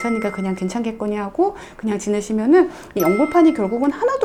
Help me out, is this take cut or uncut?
uncut